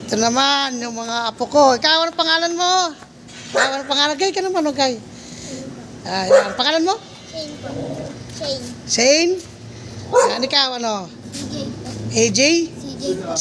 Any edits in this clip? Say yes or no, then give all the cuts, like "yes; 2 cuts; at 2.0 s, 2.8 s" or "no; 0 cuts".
no; 0 cuts